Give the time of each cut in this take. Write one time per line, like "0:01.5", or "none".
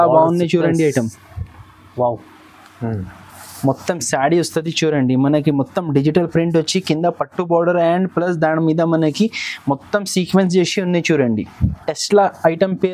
0:11.8